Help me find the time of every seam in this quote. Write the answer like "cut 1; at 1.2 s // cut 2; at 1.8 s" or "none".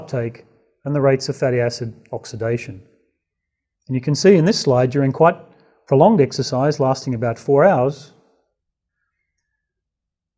cut 1; at 3.1 s